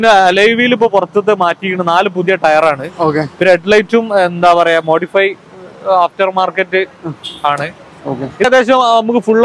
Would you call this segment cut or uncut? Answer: cut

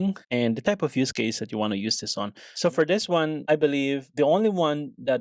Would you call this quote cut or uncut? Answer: cut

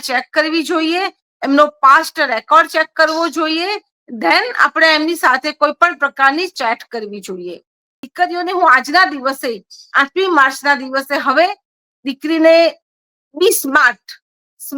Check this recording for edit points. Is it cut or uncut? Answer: cut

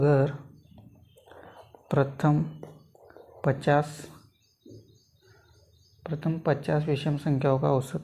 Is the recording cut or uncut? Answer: uncut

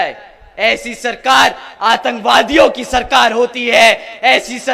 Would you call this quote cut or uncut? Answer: uncut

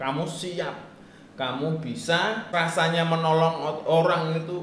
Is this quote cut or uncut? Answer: cut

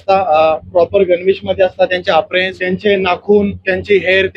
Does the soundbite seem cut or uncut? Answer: cut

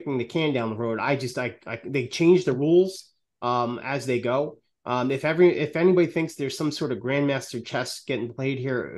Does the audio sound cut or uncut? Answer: uncut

